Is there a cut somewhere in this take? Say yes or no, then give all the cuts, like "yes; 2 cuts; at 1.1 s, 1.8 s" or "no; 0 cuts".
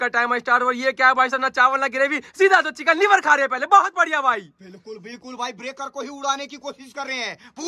no; 0 cuts